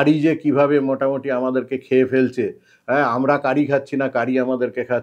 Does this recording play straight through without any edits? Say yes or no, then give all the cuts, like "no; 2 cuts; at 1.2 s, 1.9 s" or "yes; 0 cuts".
yes; 0 cuts